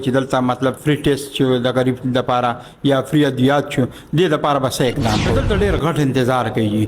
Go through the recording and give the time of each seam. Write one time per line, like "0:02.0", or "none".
0:05.3